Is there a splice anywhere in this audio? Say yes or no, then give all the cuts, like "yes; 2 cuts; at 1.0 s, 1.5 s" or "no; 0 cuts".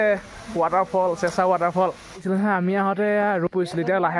yes; 1 cut; at 2.1 s